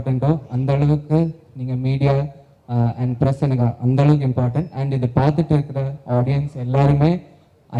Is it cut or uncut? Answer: uncut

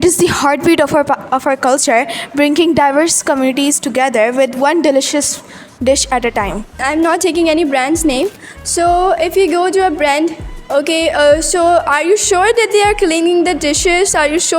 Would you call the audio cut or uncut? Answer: cut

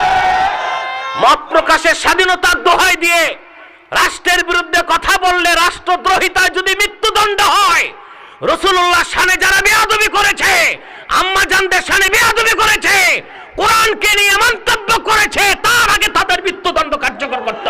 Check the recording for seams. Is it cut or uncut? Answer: cut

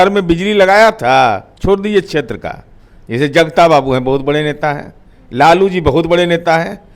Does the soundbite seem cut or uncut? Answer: cut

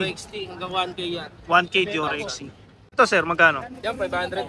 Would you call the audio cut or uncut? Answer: cut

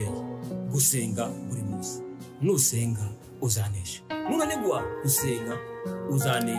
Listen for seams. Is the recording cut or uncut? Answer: uncut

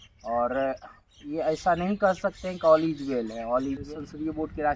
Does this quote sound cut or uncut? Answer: cut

